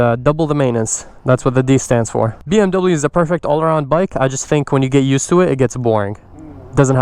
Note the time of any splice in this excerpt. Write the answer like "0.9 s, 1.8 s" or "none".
2.4 s